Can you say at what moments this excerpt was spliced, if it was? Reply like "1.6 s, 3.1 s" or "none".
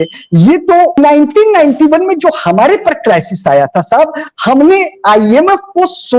1.0 s

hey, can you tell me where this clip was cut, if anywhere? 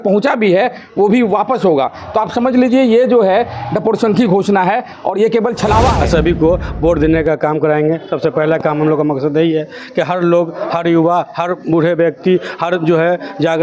6.0 s

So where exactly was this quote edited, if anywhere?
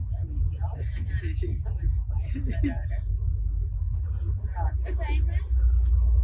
none

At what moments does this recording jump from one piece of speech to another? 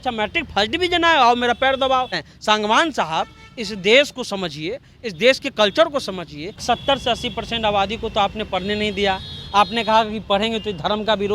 2.2 s, 6.6 s

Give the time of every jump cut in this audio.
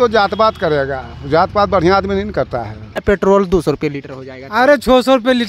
3.0 s

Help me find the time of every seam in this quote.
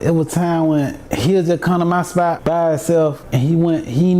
1.0 s, 2.4 s, 3.2 s

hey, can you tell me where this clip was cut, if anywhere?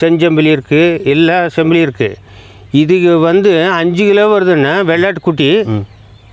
none

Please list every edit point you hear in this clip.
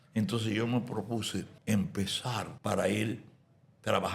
1.5 s, 2.5 s

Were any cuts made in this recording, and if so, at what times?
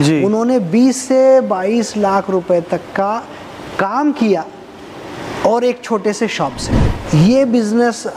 6.9 s

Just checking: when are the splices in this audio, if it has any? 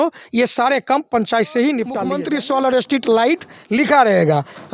2.1 s

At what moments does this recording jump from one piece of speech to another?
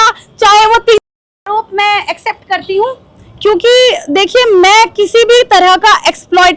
1.4 s

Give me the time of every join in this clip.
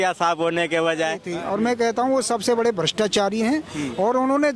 1.3 s

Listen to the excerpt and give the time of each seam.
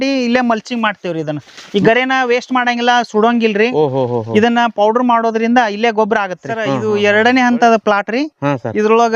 6.8 s

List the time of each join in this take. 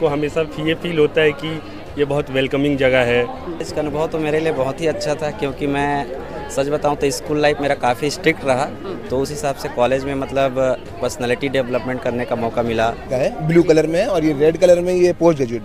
3.6 s, 13.1 s

